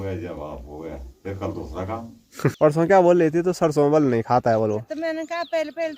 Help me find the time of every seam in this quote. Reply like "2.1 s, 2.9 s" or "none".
2.5 s